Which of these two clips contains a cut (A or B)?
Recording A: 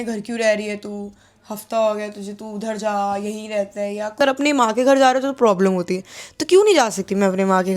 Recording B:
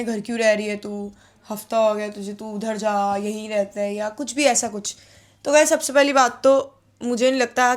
A